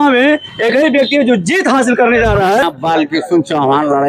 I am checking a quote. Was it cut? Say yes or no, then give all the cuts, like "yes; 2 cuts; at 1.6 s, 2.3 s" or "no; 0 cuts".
yes; 1 cut; at 2.6 s